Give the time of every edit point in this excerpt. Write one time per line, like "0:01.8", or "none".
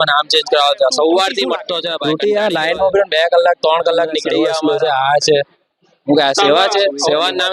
0:01.9
0:04.5